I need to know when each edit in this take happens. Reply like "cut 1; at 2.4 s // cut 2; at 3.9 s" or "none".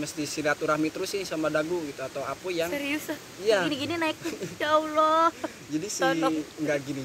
none